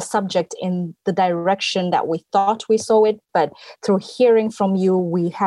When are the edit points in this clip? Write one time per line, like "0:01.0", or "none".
none